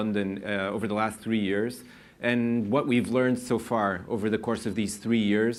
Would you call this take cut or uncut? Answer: uncut